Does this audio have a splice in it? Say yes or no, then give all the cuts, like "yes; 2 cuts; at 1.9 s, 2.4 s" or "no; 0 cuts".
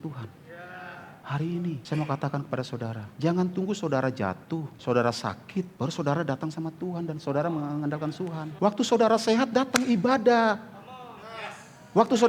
yes; 6 cuts; at 1.2 s, 1.8 s, 3.0 s, 4.7 s, 5.7 s, 8.4 s